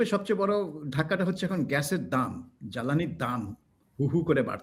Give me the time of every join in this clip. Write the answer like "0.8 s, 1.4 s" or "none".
none